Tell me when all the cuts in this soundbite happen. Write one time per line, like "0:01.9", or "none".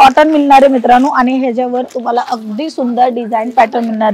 none